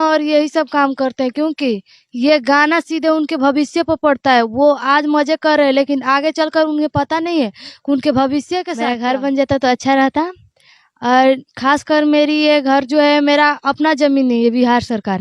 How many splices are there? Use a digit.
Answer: 1